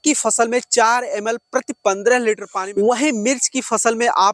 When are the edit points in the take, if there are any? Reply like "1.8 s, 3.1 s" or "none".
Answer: 2.6 s